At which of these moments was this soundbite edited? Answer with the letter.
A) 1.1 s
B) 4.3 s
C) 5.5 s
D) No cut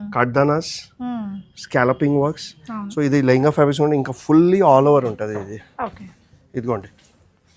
D